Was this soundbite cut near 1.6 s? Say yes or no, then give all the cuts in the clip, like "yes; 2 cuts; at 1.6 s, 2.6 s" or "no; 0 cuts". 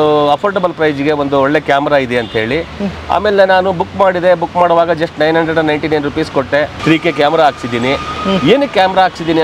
no; 1 cut; at 6.8 s